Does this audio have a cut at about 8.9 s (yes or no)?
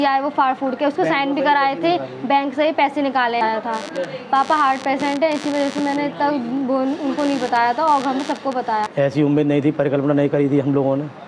yes